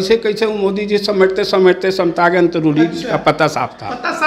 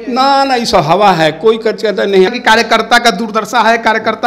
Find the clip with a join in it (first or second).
second